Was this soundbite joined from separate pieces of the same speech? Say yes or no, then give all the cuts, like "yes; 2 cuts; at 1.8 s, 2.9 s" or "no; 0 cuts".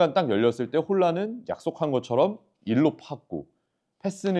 no; 0 cuts